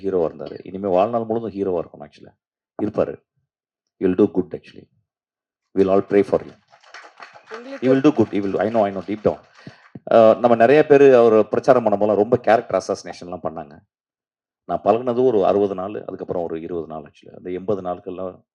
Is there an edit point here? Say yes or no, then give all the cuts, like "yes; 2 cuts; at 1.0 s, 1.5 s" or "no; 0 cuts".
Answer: no; 0 cuts